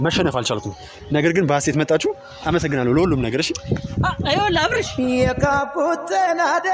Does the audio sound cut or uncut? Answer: uncut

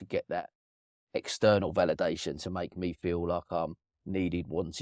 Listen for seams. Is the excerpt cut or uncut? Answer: uncut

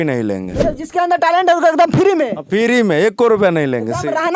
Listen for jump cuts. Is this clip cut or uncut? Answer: uncut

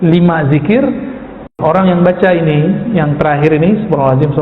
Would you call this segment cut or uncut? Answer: cut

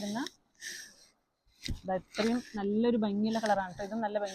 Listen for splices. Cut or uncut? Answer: uncut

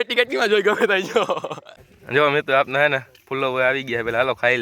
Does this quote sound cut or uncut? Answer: cut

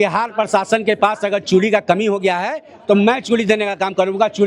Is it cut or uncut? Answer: uncut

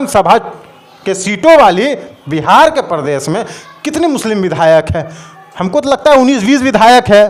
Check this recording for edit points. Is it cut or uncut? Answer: uncut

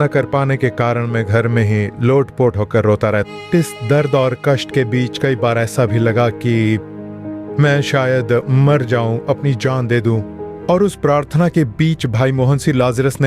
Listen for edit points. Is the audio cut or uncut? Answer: cut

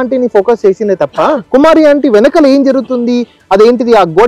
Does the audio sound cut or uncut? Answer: cut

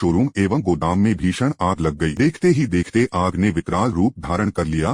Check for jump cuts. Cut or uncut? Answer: cut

